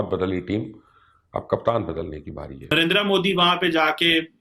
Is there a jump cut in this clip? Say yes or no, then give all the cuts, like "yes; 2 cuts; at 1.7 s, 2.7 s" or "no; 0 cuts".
yes; 1 cut; at 2.7 s